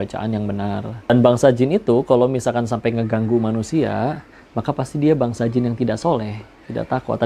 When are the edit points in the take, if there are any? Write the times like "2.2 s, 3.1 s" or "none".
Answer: 1.0 s